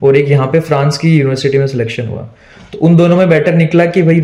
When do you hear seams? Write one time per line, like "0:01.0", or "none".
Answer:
none